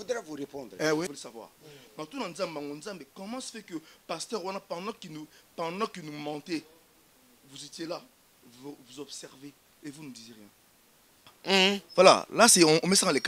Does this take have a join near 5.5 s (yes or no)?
no